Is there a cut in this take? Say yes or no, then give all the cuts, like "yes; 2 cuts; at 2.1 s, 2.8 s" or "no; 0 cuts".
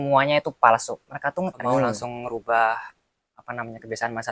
yes; 1 cut; at 1.6 s